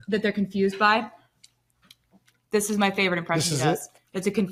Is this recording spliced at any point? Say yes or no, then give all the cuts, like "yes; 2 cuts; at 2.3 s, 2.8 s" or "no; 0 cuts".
no; 0 cuts